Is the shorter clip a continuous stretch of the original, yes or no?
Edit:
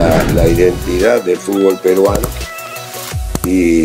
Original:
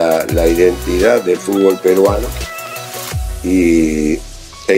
yes